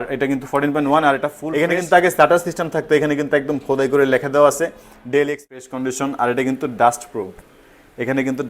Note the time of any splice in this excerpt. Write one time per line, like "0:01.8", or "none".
0:01.4
0:05.5